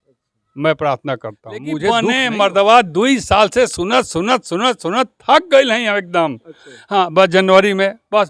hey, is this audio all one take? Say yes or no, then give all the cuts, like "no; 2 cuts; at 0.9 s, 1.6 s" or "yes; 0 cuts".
no; 1 cut; at 1.8 s